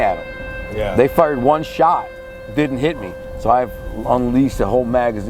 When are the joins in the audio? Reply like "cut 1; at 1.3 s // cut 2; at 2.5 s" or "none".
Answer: none